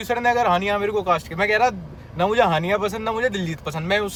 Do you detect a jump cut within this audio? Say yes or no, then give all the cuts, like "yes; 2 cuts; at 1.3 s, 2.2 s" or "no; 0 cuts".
no; 0 cuts